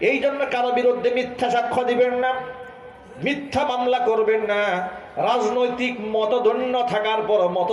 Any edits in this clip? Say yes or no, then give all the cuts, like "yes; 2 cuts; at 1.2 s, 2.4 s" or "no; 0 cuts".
no; 0 cuts